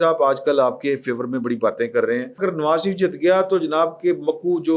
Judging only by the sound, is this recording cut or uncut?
cut